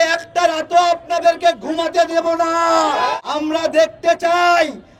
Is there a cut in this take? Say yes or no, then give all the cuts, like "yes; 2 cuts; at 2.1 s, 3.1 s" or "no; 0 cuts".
yes; 1 cut; at 3.1 s